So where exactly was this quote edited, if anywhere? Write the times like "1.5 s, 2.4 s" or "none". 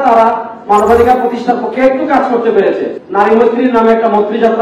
3.0 s

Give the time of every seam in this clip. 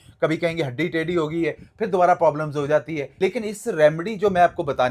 3.0 s

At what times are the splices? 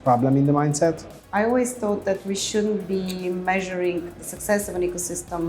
1.1 s

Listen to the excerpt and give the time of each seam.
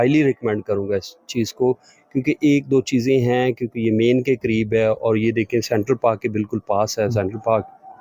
none

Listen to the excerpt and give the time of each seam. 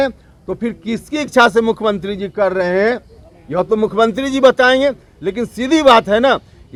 none

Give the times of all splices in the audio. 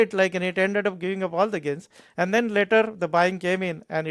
none

